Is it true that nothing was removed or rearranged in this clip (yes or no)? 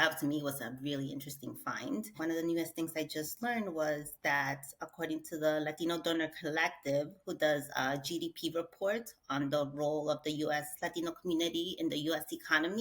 no